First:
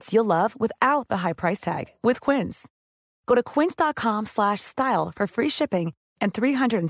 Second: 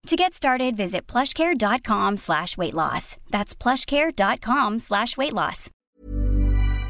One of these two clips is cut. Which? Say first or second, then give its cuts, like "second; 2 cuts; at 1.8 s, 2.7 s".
second; 1 cut; at 5.8 s